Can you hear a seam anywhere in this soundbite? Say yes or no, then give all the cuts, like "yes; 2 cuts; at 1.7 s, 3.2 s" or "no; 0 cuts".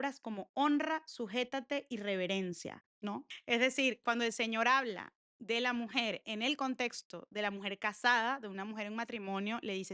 no; 0 cuts